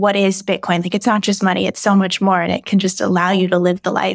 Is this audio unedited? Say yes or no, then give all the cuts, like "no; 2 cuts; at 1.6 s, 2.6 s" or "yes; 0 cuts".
yes; 0 cuts